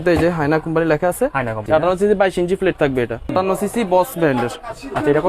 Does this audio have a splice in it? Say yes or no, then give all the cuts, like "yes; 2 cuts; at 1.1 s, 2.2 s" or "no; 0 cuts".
yes; 2 cuts; at 1.6 s, 3.3 s